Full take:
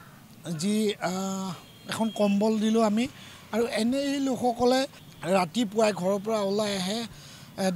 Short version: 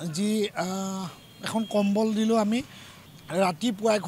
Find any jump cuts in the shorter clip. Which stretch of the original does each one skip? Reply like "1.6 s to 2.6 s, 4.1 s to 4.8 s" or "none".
3.4 s to 4.9 s